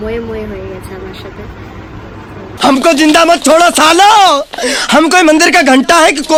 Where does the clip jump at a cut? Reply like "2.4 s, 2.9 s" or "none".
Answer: none